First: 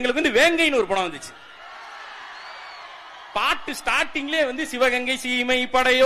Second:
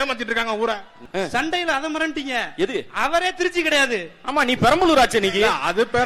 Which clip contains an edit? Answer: second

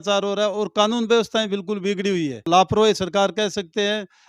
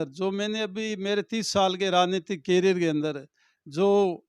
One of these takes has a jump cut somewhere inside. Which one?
first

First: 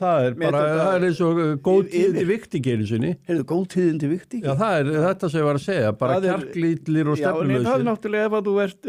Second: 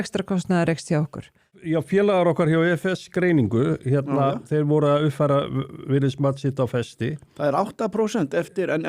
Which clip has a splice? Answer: second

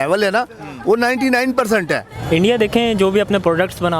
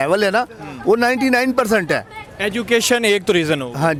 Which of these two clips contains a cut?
first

